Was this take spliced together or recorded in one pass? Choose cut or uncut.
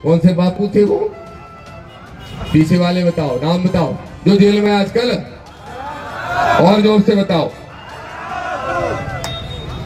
uncut